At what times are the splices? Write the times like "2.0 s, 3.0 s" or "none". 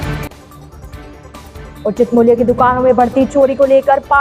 none